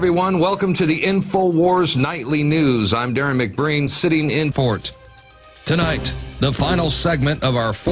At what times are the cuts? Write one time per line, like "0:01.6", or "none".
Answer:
none